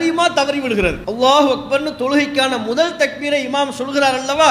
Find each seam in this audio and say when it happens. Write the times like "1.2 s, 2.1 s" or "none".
1.0 s